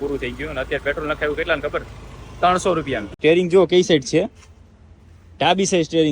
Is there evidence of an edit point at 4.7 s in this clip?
no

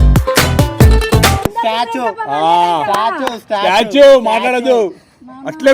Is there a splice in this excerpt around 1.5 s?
yes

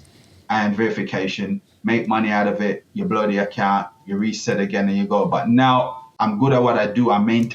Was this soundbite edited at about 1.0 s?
no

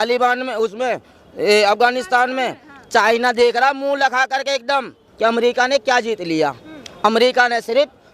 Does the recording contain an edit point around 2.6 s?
no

